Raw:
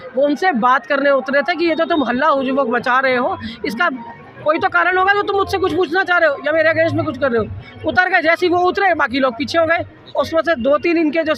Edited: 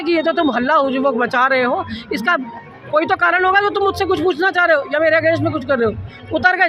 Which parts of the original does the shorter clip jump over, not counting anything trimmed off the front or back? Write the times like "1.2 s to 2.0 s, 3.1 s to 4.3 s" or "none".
none